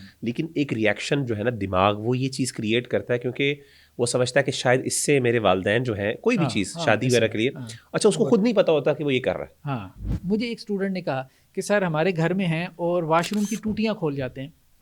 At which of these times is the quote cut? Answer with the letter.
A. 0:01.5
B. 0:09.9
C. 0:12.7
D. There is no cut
B